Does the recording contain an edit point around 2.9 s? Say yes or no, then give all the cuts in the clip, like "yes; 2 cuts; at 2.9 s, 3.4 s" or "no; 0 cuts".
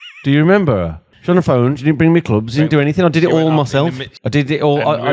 no; 2 cuts; at 1.1 s, 4.1 s